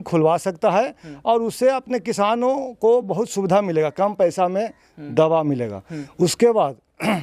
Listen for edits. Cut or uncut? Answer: uncut